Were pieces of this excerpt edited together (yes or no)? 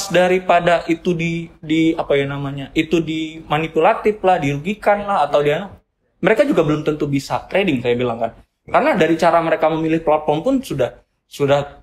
no